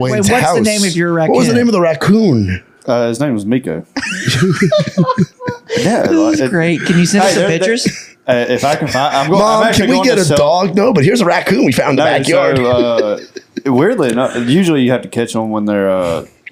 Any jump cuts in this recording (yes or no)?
no